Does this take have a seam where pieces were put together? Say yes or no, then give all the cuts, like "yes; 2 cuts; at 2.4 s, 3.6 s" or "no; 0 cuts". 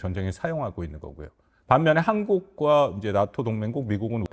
no; 0 cuts